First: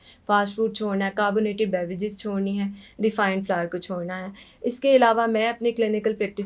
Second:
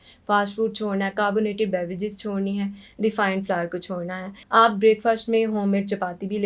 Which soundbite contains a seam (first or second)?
second